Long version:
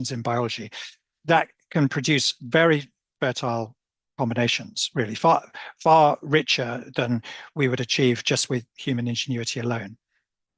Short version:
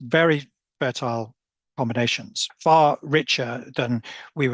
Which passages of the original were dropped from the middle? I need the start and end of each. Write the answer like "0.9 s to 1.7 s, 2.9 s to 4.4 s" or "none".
4.8 s to 5.6 s